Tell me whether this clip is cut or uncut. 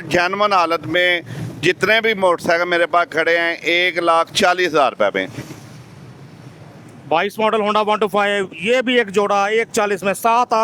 uncut